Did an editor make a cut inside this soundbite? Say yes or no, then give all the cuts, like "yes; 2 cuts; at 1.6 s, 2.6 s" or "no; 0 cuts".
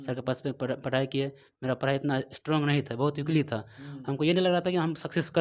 no; 0 cuts